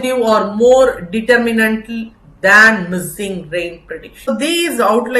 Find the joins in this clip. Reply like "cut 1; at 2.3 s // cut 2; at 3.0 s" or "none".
cut 1; at 4.3 s